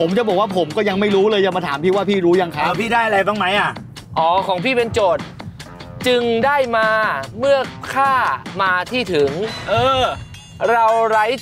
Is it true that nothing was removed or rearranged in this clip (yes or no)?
yes